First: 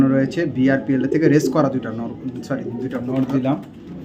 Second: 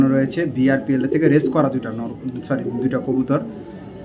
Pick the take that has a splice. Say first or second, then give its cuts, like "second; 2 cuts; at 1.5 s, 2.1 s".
first; 1 cut; at 3.0 s